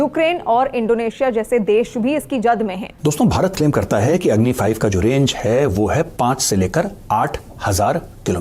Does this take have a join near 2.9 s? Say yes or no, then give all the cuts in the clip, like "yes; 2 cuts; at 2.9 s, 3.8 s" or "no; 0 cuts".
yes; 1 cut; at 2.9 s